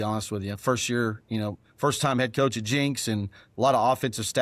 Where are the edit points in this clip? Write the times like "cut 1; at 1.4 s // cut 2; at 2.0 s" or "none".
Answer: none